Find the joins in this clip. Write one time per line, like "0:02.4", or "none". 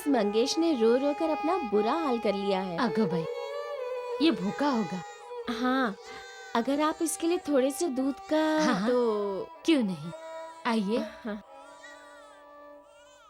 none